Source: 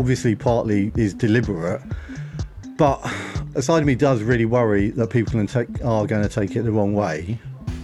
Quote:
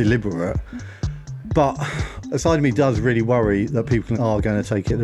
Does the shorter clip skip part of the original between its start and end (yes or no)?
yes